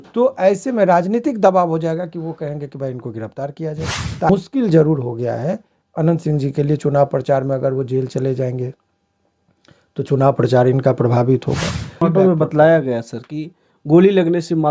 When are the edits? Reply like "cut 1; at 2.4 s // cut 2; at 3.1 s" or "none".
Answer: cut 1; at 4.3 s // cut 2; at 12.0 s